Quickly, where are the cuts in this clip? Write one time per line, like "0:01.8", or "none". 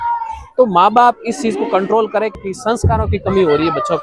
0:02.3